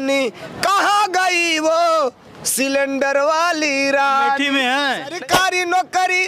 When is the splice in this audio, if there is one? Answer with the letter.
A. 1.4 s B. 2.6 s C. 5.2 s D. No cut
C